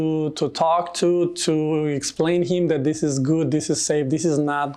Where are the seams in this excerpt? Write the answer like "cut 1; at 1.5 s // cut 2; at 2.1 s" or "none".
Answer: none